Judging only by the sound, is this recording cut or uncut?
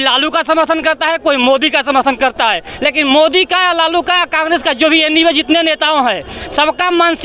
uncut